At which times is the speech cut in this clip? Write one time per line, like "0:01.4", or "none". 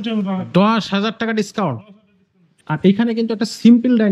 0:02.5